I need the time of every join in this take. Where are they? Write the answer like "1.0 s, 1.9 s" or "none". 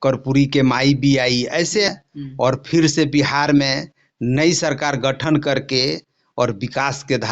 1.9 s